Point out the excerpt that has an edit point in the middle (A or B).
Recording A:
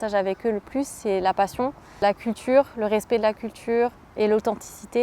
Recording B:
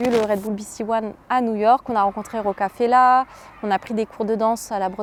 A